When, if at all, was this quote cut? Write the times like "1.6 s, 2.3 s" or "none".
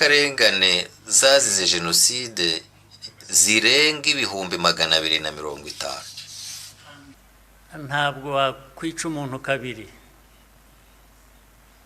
7.1 s

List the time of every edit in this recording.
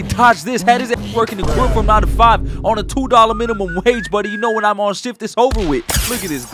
none

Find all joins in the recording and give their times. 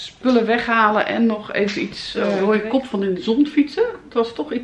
2.4 s

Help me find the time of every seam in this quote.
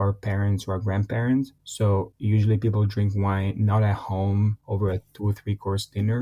4.6 s

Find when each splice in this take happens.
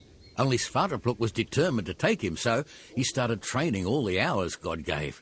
none

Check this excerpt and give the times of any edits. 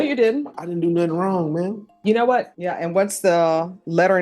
2.6 s

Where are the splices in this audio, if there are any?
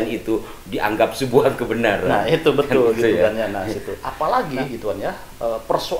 4.0 s

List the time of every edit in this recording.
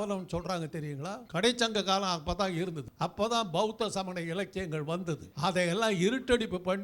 1.2 s, 2.8 s, 5.3 s

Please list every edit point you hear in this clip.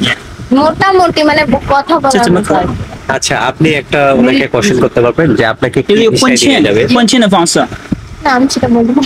none

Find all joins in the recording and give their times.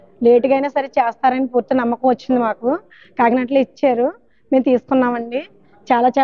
3.0 s

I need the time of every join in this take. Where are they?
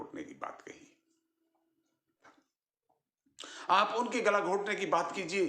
2.3 s

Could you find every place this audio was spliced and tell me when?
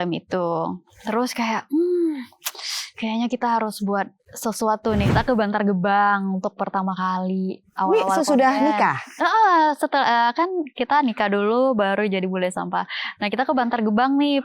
5.1 s

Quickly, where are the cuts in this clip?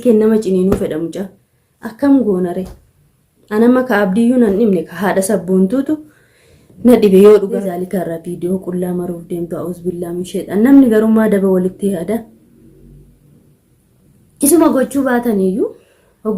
7.6 s

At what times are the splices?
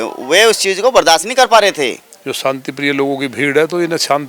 2.1 s

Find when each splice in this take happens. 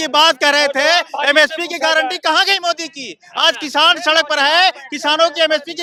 none

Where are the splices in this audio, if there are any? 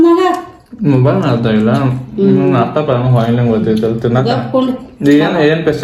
none

